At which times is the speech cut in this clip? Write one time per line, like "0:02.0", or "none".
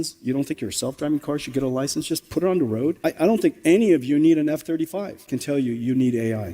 0:03.0
0:05.2